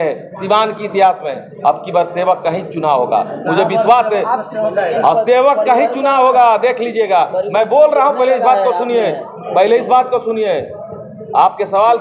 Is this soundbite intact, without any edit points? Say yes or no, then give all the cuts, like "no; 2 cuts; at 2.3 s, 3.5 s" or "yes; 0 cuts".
yes; 0 cuts